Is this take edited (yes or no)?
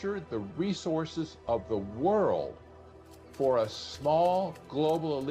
no